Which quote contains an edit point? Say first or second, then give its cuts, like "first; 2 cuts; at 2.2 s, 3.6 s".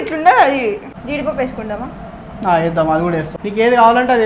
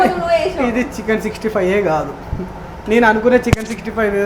first; 1 cut; at 0.9 s